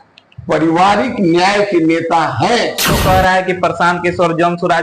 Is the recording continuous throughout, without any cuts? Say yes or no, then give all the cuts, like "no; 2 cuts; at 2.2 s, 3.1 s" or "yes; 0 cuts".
no; 1 cut; at 2.9 s